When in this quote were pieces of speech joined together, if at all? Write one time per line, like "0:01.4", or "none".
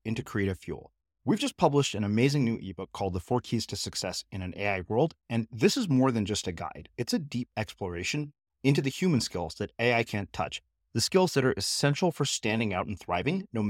none

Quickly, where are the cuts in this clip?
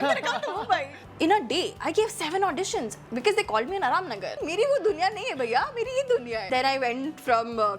0:01.0
0:04.4
0:06.5

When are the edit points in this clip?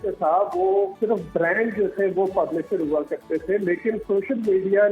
0:00.9

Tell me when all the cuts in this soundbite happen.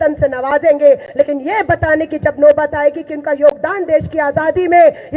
none

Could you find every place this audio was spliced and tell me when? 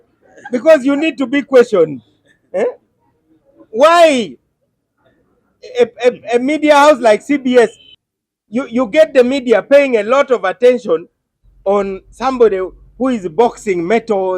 0:07.9

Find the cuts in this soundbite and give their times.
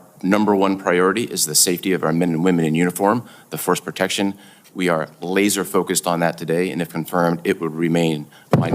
none

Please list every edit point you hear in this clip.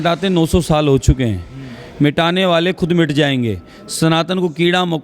none

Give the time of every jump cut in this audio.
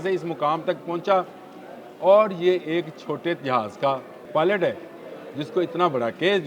0:04.1

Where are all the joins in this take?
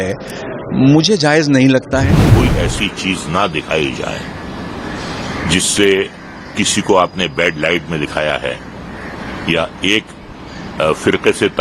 0:02.3

